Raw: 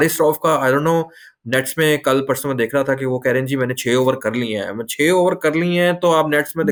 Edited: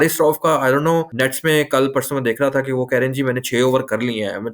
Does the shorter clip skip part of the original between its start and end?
yes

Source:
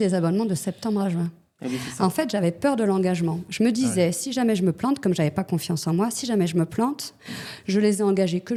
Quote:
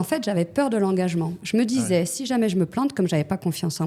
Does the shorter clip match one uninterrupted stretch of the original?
yes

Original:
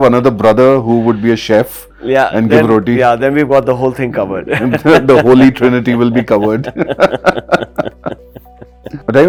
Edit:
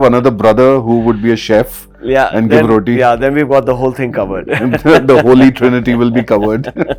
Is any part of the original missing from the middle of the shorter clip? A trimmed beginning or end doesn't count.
no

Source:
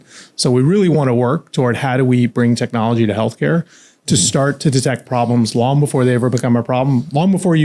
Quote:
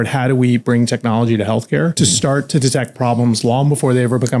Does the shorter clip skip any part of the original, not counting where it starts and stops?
yes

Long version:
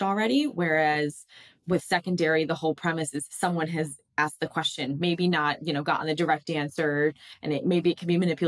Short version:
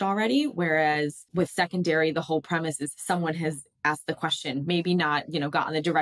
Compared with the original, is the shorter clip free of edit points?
no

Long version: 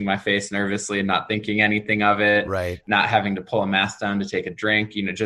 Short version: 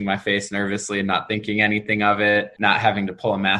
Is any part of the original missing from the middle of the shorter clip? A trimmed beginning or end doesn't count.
yes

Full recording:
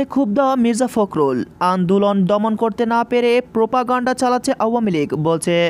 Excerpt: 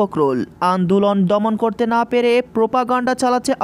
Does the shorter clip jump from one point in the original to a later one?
no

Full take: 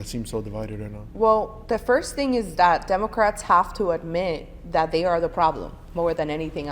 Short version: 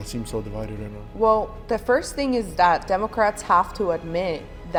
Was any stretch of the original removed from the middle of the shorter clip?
no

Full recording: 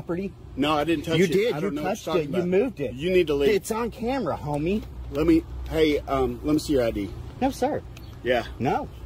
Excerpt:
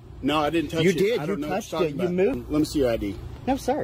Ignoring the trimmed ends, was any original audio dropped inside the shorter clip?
yes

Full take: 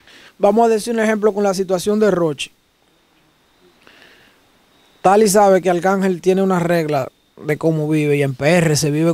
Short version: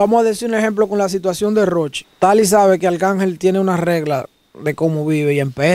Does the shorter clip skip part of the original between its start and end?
yes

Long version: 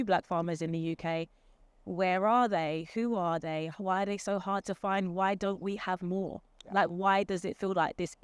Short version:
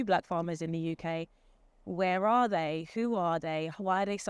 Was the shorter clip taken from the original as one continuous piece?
yes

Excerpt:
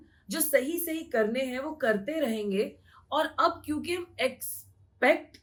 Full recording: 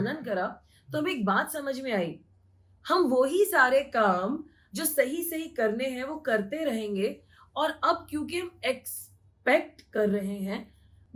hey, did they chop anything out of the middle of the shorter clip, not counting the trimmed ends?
no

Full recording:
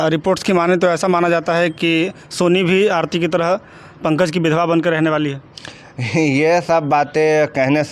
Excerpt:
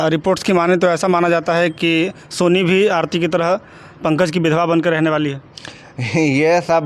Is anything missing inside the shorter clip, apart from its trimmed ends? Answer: no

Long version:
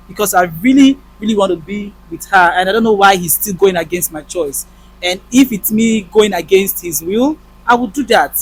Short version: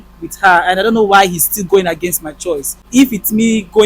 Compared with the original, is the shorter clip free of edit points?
no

